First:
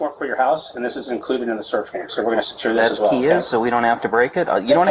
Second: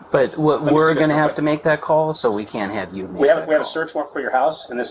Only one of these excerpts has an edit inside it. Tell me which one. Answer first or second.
first